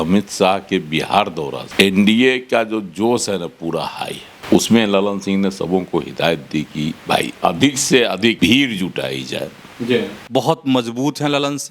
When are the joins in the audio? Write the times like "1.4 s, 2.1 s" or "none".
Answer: 1.6 s, 4.3 s, 8.4 s, 10.2 s

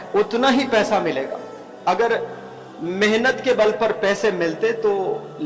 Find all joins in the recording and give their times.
none

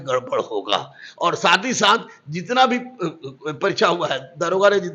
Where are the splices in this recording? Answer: none

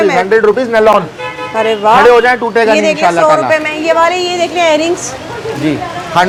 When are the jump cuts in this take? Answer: none

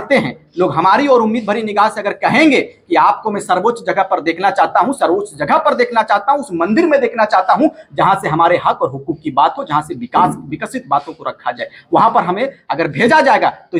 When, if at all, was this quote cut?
none

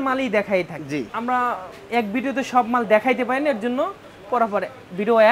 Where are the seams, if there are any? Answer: 1.1 s, 4.1 s

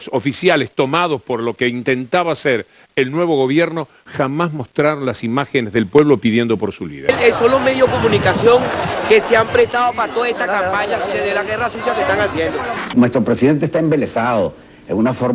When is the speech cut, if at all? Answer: 7.1 s, 12.8 s

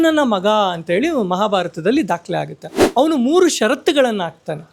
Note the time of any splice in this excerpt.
2.8 s

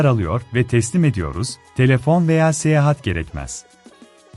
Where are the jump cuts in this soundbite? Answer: none

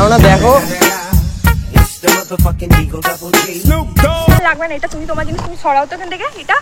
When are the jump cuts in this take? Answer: 4.5 s

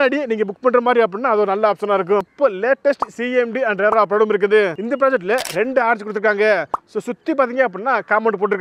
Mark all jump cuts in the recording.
2.3 s, 4.8 s

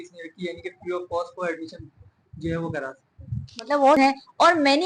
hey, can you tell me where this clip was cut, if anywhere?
4.0 s

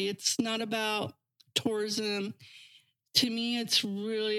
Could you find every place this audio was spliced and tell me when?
none

